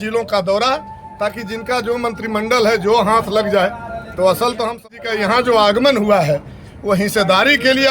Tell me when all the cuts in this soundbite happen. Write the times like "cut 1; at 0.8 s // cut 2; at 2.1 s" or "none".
cut 1; at 4.8 s